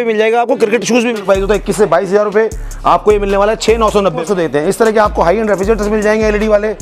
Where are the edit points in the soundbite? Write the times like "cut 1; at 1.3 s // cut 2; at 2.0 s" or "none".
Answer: cut 1; at 1.2 s // cut 2; at 4.2 s